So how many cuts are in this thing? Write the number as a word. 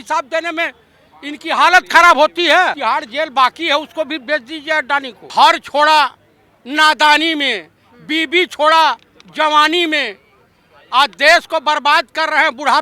two